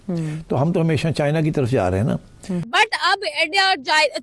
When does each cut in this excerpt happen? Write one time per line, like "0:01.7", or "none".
0:02.7